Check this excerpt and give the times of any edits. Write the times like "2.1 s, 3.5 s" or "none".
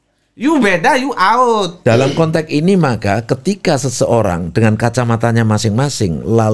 1.7 s